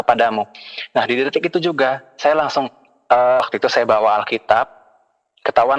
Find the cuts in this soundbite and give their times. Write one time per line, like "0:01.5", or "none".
0:03.4

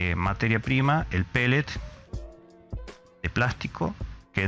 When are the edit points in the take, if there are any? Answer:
0:01.7
0:03.2

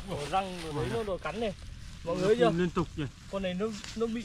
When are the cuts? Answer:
none

